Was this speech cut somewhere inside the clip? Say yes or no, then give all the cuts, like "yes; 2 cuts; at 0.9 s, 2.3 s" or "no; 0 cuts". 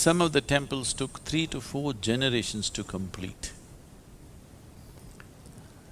yes; 1 cut; at 4.8 s